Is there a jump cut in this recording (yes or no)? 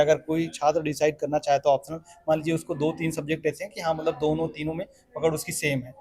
no